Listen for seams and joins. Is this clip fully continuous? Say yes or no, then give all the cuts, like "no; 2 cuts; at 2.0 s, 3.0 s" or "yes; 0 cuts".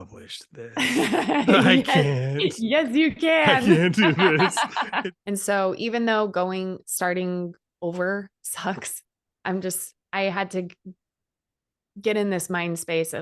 no; 1 cut; at 5.0 s